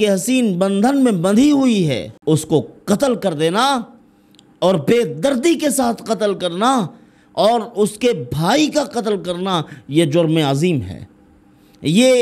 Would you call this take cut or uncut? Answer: cut